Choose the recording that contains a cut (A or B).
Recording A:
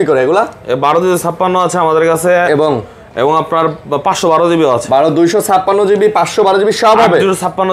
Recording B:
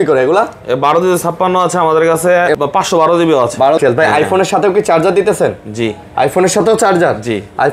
B